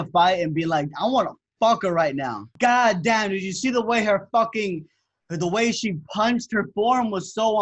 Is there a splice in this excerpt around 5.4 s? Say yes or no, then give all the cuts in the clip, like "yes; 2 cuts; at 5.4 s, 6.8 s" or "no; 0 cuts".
no; 1 cut; at 2.4 s